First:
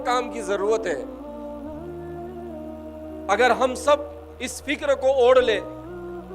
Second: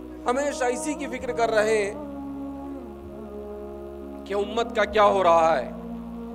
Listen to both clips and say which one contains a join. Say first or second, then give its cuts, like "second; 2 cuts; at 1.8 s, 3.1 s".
first; 2 cuts; at 1.1 s, 3.2 s